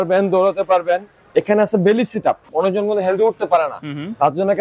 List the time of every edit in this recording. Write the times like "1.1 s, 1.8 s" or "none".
1.2 s, 2.5 s

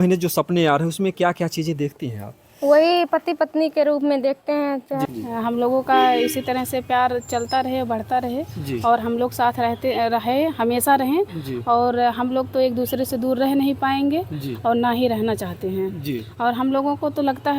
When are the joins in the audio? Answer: 5.0 s

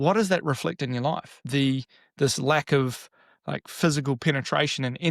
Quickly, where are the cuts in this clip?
1.4 s

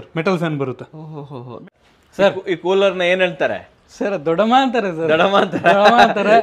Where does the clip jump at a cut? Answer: 1.7 s

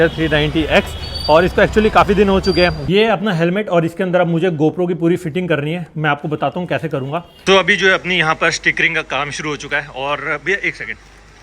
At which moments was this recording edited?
2.8 s, 7.4 s

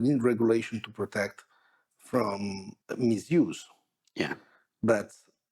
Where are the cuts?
2.7 s

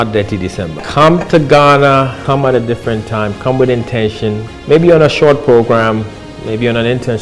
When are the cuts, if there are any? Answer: 0.8 s, 2.2 s, 4.5 s

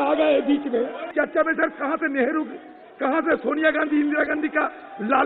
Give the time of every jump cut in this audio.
1.1 s

